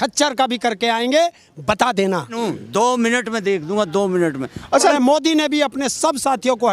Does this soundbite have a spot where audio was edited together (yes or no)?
yes